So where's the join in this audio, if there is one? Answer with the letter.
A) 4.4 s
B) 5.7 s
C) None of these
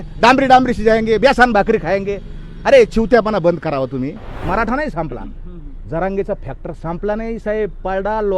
A